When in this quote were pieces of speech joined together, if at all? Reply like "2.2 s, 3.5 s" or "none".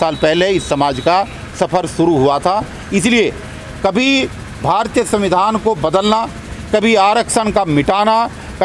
none

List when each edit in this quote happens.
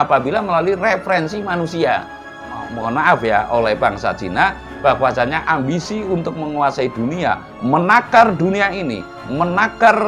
2.5 s

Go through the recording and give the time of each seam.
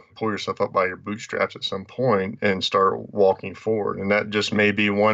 none

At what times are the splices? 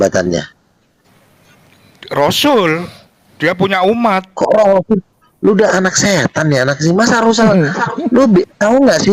none

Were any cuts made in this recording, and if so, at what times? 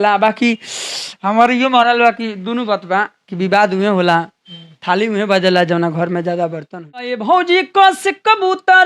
7.2 s

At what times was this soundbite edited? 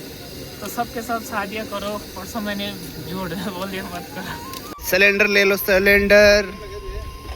4.5 s

